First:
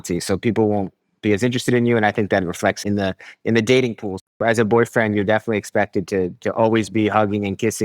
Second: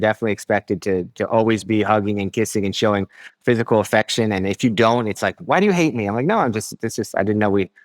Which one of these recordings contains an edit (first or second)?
first